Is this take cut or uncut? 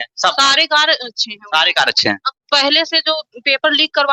uncut